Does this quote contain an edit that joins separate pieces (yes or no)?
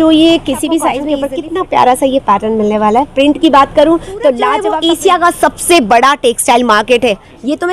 yes